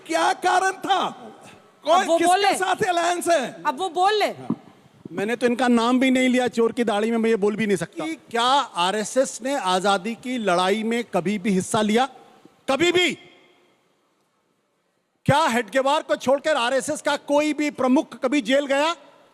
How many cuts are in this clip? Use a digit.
1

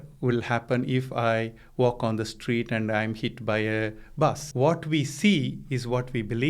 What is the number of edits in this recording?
1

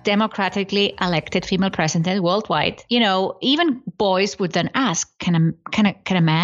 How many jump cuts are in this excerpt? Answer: 1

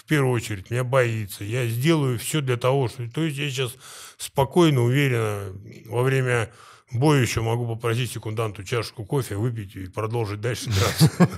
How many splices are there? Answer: 0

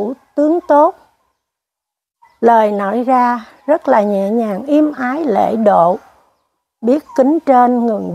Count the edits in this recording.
0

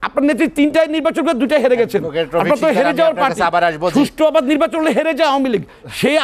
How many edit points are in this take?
0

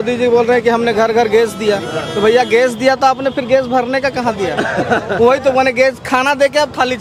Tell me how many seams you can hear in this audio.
0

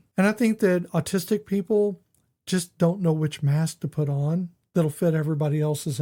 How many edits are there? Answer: 0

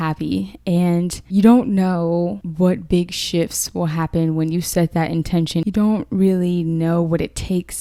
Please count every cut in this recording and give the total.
0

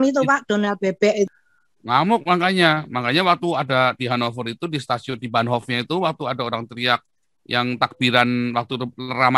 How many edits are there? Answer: 1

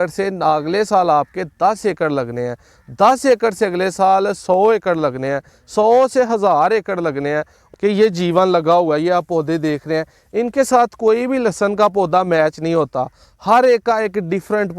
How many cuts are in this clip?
1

